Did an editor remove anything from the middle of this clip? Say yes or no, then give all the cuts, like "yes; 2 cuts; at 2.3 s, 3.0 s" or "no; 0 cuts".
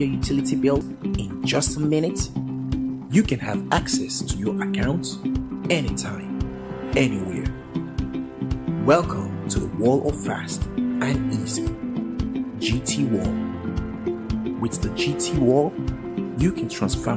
yes; 1 cut; at 0.9 s